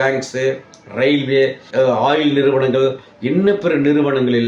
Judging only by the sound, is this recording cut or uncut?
uncut